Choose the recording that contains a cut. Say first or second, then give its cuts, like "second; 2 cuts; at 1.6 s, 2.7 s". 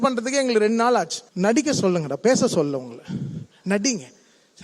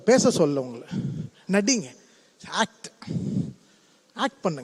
first; 1 cut; at 1.2 s